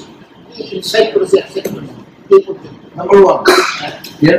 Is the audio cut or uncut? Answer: uncut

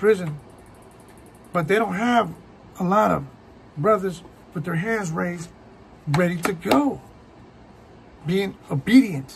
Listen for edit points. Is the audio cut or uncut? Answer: uncut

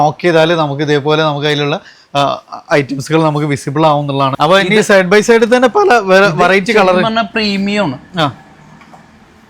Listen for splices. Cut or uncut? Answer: cut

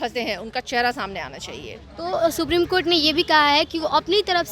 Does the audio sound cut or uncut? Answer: uncut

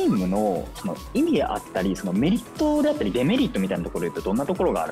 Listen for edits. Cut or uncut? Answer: uncut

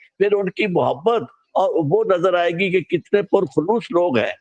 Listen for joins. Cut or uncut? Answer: uncut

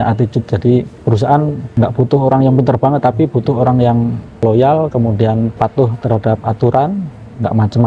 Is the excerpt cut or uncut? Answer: cut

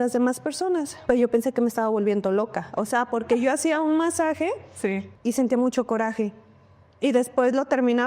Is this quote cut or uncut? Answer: cut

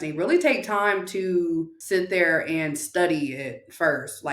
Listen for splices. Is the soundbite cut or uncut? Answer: cut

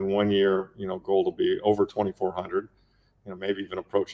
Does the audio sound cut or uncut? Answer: uncut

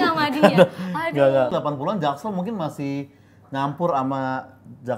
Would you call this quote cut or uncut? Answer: cut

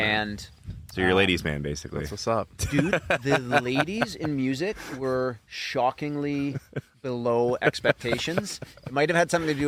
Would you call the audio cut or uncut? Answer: uncut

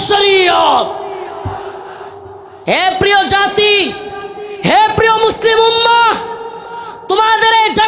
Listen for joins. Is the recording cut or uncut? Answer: cut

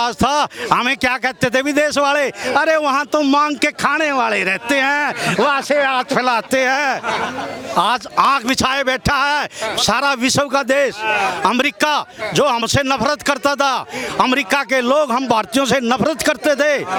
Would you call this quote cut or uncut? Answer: uncut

